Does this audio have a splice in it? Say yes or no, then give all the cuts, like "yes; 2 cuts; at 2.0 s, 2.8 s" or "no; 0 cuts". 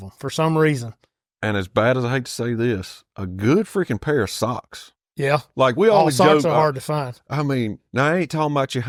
no; 0 cuts